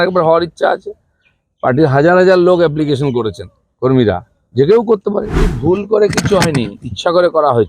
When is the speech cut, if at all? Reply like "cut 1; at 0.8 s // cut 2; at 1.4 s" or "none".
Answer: cut 1; at 5.5 s

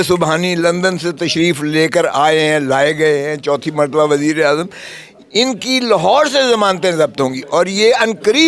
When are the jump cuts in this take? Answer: none

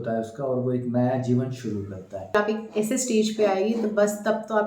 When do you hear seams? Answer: cut 1; at 2.3 s

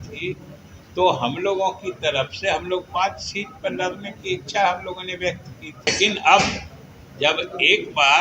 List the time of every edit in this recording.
cut 1; at 5.9 s

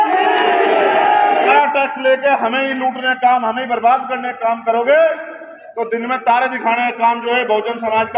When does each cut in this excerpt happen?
cut 1; at 1.5 s

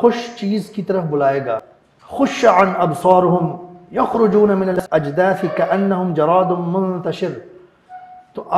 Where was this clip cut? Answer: cut 1; at 1.8 s // cut 2; at 4.8 s

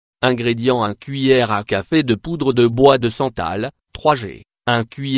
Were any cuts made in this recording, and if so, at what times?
none

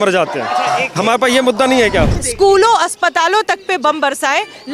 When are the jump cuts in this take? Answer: cut 1; at 2.2 s

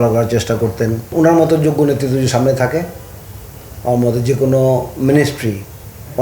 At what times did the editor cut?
cut 1; at 1.1 s

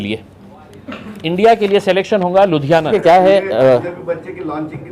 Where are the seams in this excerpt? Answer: cut 1; at 2.9 s

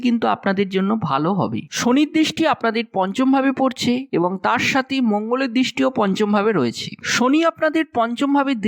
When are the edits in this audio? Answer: cut 1; at 1.6 s

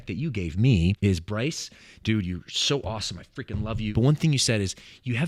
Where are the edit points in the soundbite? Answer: cut 1; at 1.0 s // cut 2; at 3.9 s

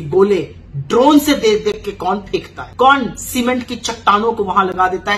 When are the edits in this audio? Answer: cut 1; at 2.6 s

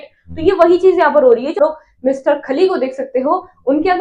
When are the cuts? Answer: cut 1; at 1.6 s

